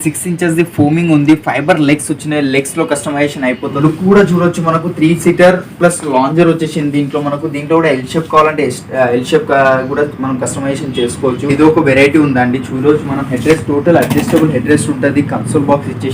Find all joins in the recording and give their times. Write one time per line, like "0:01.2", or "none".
0:03.7
0:11.5